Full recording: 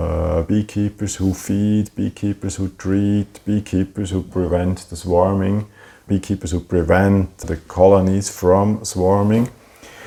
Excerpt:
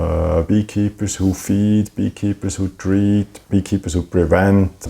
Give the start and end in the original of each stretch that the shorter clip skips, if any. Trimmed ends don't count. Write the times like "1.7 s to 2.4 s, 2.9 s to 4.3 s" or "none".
3.3 s to 5.9 s